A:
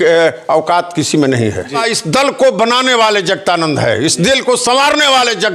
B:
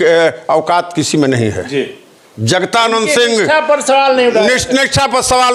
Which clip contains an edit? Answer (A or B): A